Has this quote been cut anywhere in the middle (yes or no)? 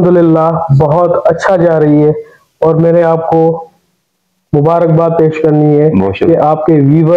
no